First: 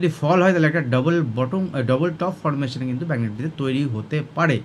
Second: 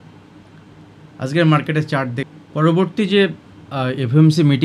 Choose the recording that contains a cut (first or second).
second